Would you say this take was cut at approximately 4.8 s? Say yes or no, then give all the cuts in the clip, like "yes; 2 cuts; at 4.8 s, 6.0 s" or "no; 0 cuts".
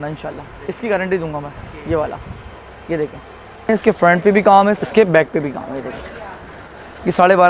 yes; 2 cuts; at 3.7 s, 4.8 s